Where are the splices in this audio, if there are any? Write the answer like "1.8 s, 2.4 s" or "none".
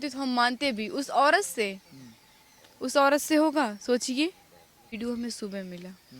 4.9 s

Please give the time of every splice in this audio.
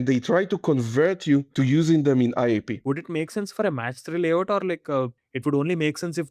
1.5 s, 2.7 s, 5.2 s

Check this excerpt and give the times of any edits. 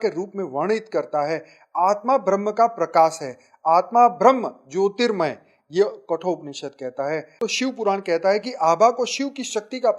7.4 s

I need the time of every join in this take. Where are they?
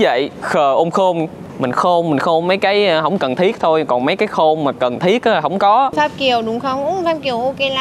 1.4 s, 5.9 s

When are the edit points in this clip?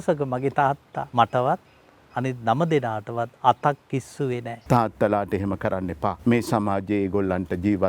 1.0 s, 4.5 s, 6.2 s

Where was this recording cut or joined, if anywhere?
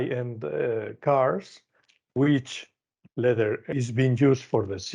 3.7 s

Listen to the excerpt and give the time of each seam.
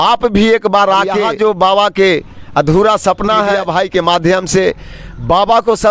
1.3 s, 3.6 s

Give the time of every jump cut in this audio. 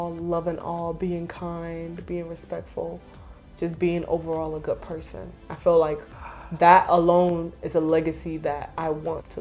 none

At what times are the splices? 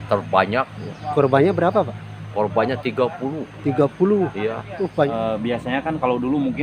5.1 s

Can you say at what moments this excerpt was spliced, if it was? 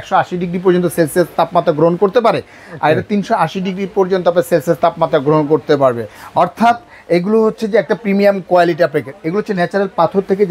none

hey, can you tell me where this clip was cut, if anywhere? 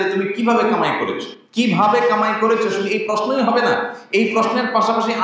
1.3 s

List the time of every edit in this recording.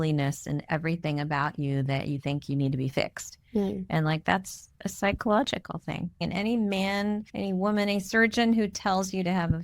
6.2 s, 7.3 s

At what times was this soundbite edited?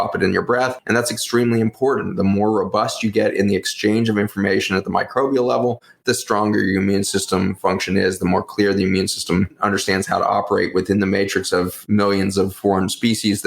11.8 s, 12.5 s

